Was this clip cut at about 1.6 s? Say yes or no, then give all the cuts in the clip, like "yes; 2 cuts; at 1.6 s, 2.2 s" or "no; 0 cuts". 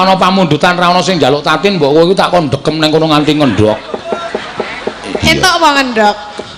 no; 0 cuts